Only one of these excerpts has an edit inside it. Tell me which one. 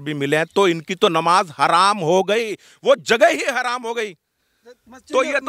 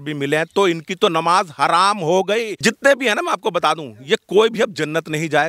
second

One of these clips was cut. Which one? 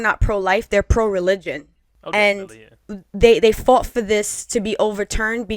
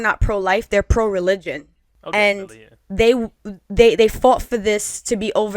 first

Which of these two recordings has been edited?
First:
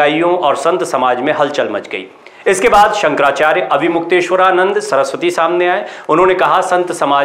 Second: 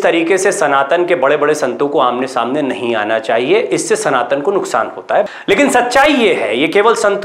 second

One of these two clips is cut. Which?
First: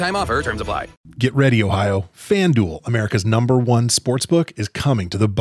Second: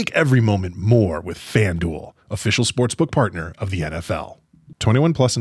first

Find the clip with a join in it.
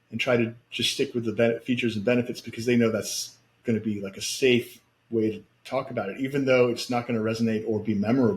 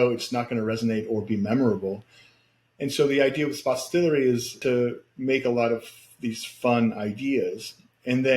second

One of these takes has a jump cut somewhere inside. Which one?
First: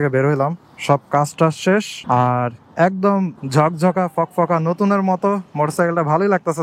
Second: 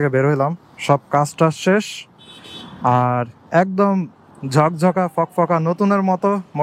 first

